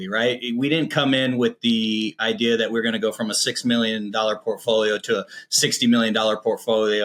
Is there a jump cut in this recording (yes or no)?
no